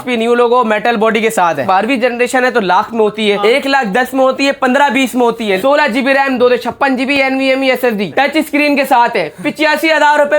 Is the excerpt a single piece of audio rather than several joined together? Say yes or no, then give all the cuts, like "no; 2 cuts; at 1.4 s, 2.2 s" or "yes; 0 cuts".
no; 3 cuts; at 1.6 s, 5.6 s, 8.1 s